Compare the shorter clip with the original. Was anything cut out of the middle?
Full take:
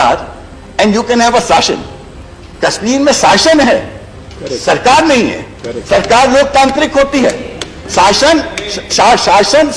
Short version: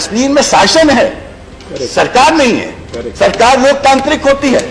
no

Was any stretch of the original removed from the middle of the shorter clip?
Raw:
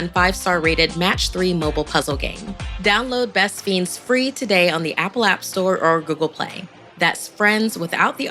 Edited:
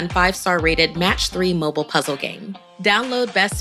no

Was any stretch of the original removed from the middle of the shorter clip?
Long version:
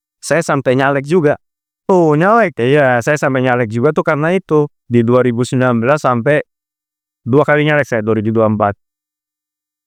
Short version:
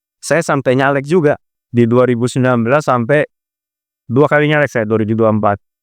yes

